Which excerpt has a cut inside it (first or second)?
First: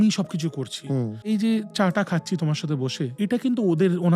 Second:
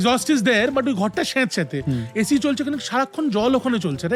first